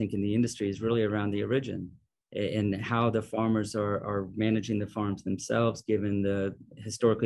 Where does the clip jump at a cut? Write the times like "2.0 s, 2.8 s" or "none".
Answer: none